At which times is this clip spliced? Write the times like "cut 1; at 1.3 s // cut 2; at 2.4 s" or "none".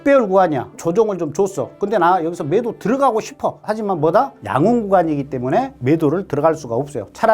cut 1; at 3.6 s